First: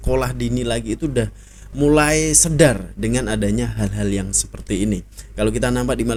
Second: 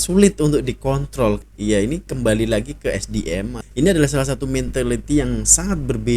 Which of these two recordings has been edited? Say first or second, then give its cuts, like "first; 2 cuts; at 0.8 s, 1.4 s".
second; 2 cuts; at 1.4 s, 3.6 s